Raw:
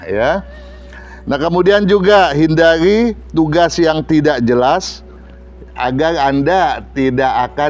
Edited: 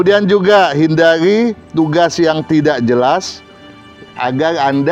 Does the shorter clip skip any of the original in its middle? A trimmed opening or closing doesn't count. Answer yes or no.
no